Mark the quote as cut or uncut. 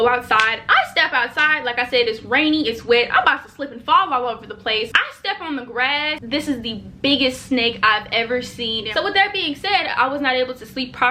cut